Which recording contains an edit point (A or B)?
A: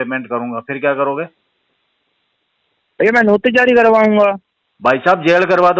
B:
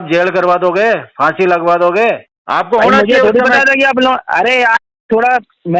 B